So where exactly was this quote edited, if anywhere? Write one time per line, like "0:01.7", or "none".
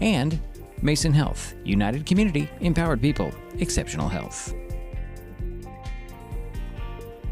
none